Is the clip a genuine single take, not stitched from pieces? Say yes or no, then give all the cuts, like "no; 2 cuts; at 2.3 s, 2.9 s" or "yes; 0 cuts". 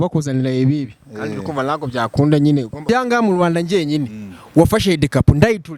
no; 1 cut; at 2.9 s